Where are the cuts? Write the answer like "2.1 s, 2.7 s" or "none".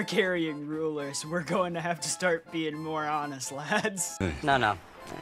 4.1 s